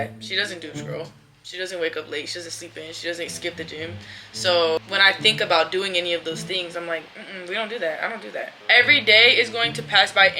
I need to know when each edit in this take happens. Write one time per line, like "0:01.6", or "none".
0:04.8
0:08.6